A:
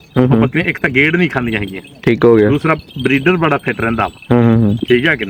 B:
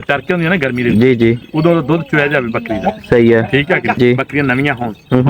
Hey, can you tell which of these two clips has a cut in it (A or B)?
B